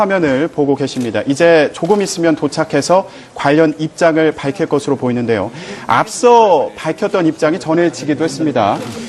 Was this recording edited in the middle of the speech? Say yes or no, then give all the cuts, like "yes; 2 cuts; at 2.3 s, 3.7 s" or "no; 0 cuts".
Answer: yes; 1 cut; at 5.2 s